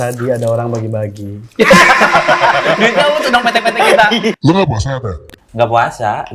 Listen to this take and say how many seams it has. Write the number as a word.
one